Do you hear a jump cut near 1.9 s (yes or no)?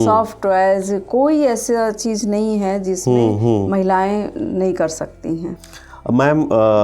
no